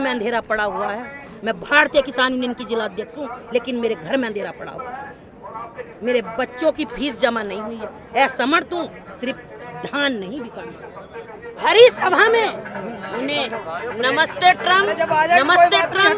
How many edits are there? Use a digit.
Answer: 1